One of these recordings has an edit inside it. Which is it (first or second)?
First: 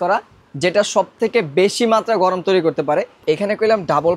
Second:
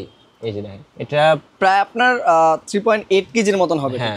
first